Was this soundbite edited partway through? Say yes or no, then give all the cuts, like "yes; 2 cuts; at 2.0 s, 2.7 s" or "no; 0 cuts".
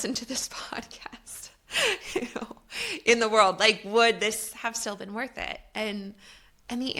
no; 0 cuts